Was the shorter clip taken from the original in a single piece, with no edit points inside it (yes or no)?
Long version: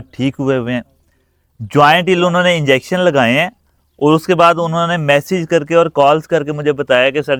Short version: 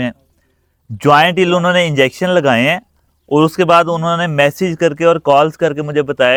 yes